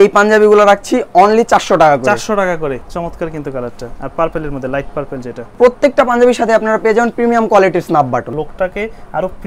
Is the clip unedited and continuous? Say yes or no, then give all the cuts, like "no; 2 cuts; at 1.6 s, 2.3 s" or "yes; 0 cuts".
no; 3 cuts; at 2.8 s, 5.5 s, 8.3 s